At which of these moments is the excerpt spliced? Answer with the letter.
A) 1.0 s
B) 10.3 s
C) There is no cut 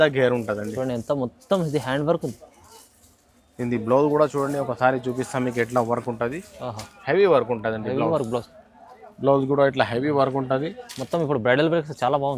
C